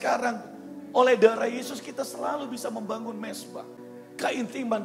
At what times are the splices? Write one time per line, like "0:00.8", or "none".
0:03.8